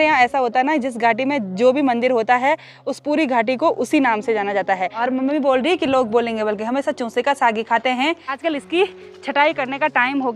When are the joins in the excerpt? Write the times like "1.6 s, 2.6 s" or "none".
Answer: 4.9 s, 8.4 s